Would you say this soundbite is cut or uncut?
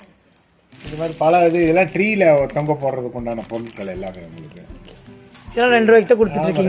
uncut